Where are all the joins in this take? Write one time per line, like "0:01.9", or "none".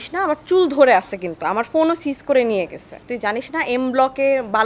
0:03.0